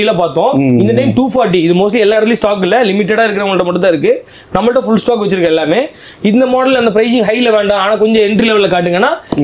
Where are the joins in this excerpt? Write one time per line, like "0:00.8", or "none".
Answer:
none